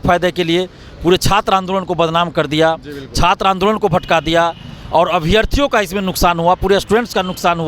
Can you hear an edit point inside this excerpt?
no; 0 cuts

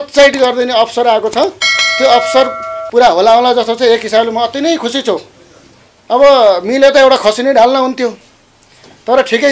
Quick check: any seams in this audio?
no; 0 cuts

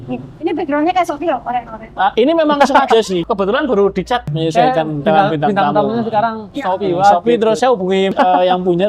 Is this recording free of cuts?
no; 4 cuts; at 3.2 s, 4.4 s, 6.5 s, 7.9 s

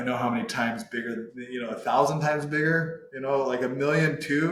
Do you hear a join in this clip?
no; 0 cuts

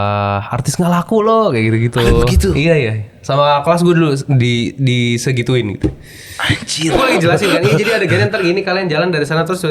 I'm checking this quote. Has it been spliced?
yes; 1 cut; at 6.9 s

